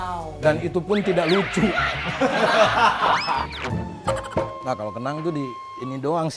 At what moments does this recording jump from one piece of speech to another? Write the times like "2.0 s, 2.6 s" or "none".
3.9 s